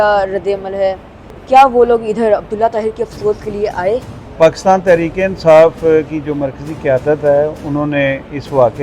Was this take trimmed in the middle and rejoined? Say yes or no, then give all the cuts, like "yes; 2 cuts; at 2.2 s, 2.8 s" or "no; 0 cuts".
yes; 1 cut; at 4.2 s